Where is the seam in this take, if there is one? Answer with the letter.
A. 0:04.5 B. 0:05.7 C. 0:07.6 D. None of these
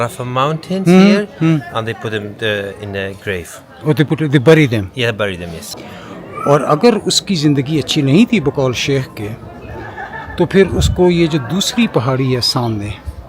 B